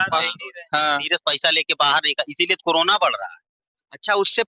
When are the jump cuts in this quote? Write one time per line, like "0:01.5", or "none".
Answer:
0:01.0

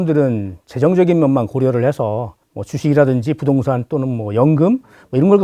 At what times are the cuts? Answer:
none

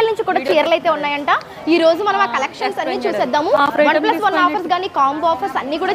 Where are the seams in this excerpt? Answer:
none

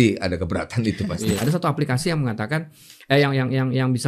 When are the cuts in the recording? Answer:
0:01.4

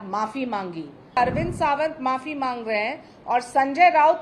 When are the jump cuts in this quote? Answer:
0:01.2

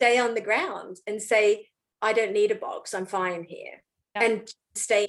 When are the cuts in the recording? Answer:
0:04.2

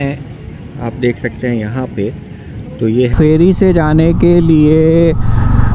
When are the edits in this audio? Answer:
0:03.1

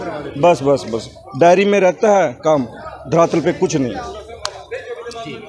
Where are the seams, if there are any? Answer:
none

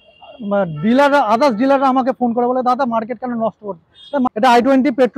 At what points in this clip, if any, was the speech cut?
0:04.3

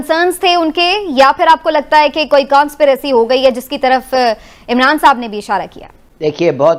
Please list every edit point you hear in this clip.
none

